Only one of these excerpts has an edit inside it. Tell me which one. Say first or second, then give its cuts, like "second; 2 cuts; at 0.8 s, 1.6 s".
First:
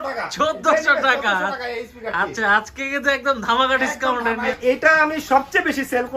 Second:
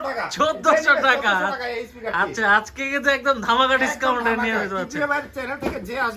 first; 1 cut; at 4.5 s